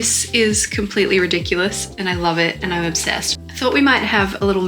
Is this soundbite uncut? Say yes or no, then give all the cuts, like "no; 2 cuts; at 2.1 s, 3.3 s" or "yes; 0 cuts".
no; 1 cut; at 3.3 s